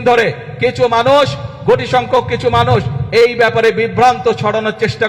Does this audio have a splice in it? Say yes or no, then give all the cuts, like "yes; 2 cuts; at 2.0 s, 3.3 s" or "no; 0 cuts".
no; 0 cuts